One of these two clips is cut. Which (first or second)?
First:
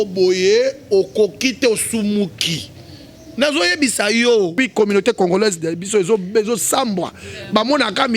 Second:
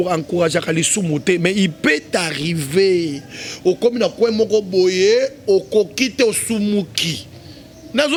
first